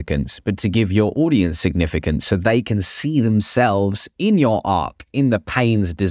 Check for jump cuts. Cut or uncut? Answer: uncut